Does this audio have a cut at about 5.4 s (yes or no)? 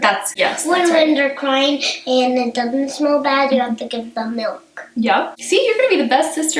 yes